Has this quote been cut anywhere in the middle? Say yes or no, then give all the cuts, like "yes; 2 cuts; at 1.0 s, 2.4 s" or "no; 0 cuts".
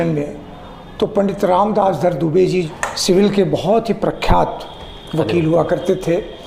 no; 0 cuts